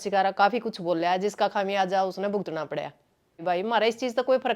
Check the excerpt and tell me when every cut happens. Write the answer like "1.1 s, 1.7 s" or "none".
3.4 s